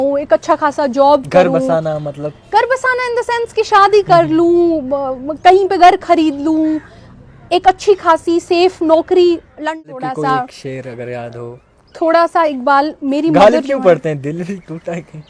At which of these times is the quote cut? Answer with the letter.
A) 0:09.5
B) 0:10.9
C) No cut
A